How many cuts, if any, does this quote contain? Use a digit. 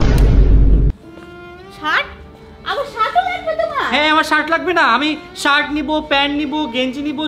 0